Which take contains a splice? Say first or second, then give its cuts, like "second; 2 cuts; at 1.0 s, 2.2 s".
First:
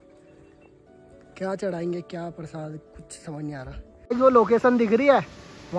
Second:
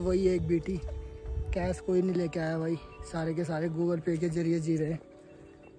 first; 1 cut; at 4.1 s